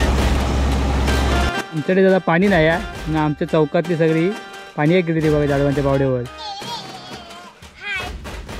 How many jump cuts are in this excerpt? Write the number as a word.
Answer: one